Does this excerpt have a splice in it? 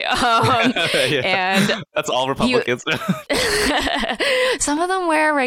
yes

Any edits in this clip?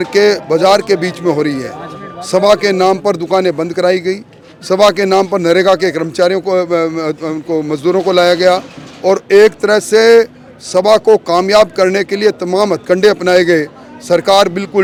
no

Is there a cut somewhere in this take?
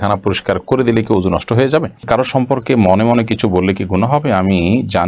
yes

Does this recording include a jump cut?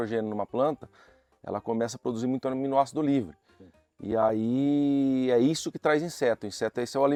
no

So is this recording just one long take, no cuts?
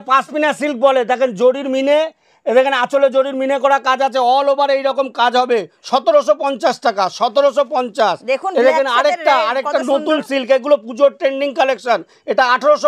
yes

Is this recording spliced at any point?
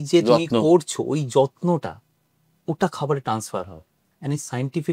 no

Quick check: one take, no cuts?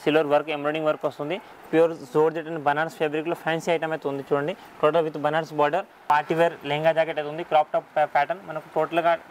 no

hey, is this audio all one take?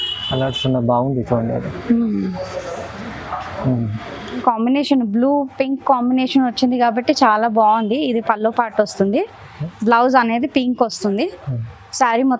no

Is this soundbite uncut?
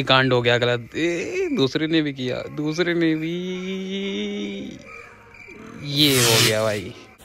yes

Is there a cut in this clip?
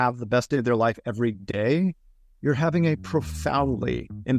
no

